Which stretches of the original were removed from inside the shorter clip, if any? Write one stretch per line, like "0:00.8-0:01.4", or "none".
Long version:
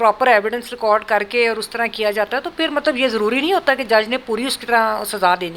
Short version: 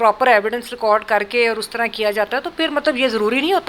none